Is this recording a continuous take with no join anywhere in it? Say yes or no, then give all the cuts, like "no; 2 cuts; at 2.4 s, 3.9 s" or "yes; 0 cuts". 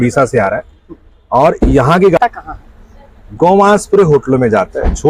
no; 1 cut; at 2.2 s